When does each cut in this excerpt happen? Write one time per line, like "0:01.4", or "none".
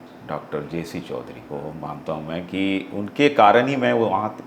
0:01.4